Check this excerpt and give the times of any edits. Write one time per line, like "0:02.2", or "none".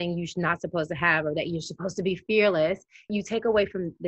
0:03.2